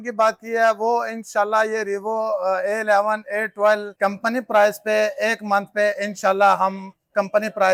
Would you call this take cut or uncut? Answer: uncut